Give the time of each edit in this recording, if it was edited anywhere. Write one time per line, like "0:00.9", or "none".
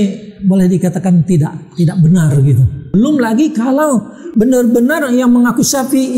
0:02.9